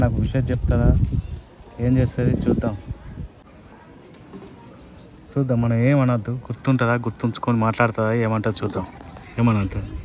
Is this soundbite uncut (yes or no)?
no